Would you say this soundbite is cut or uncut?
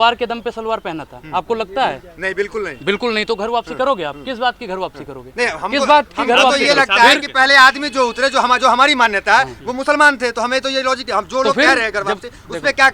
uncut